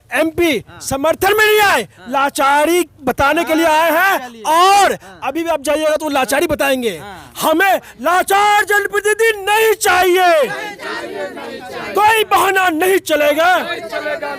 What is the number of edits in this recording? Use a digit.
0